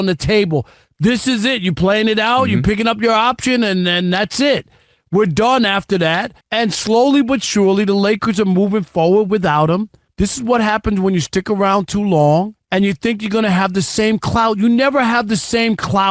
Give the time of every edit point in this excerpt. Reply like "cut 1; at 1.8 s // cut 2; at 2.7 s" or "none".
cut 1; at 6.4 s // cut 2; at 10.0 s // cut 3; at 12.6 s